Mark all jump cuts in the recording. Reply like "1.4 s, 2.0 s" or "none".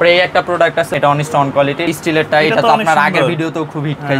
0.9 s, 1.9 s